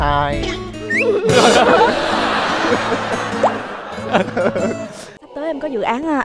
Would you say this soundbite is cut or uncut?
cut